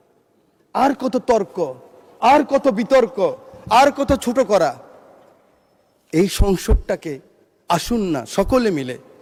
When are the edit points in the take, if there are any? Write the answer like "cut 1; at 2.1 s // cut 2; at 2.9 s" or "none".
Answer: none